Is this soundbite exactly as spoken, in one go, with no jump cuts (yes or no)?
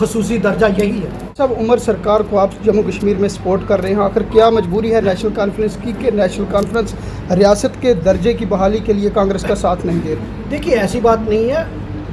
no